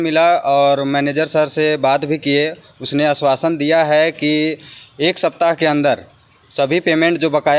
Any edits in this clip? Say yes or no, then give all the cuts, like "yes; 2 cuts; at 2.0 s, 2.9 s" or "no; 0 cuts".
no; 0 cuts